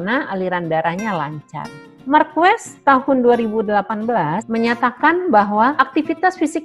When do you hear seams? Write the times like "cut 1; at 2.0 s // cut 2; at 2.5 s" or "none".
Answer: cut 1; at 4.4 s // cut 2; at 5.7 s